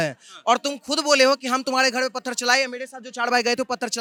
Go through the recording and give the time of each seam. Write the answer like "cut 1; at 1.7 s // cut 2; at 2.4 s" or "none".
none